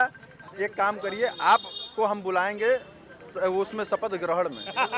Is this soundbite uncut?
yes; 0 cuts

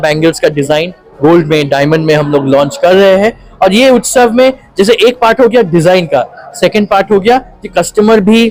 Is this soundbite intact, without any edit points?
yes; 0 cuts

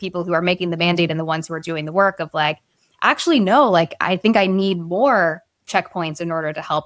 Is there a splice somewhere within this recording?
no; 0 cuts

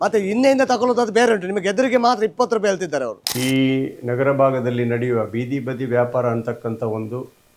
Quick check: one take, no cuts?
no; 1 cut; at 3.3 s

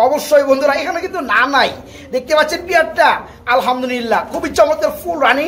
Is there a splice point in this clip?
no; 0 cuts

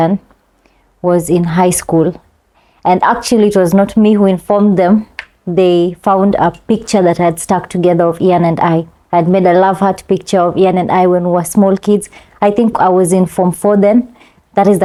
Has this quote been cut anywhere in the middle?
no; 0 cuts

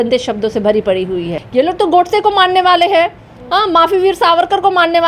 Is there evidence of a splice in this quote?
yes; 1 cut; at 1.4 s

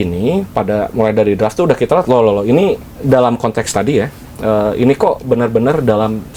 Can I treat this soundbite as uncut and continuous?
yes; 0 cuts

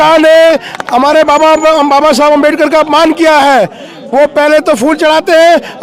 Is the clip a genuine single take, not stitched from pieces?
yes; 0 cuts

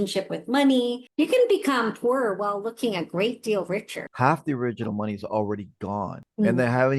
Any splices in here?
yes; 2 cuts; at 1.0 s, 4.0 s

